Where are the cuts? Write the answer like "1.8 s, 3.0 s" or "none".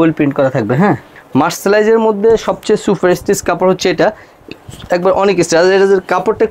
1.1 s